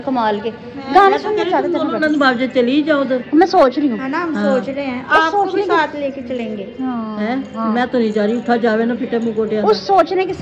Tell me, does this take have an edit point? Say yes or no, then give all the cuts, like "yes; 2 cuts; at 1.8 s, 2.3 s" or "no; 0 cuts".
no; 0 cuts